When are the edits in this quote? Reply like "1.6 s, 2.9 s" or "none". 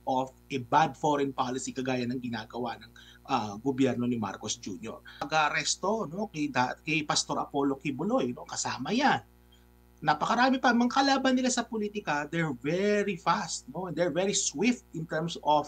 5.3 s